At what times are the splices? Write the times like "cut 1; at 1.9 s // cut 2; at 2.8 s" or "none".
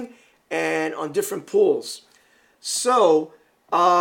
none